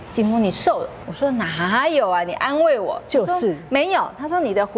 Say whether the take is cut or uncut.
cut